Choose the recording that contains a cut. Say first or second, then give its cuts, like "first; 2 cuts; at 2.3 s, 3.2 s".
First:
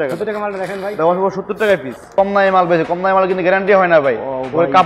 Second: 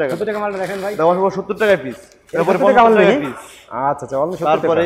first; 1 cut; at 2.1 s